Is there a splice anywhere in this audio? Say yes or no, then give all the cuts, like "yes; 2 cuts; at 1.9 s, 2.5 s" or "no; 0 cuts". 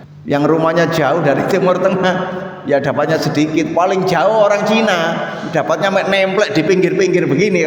no; 0 cuts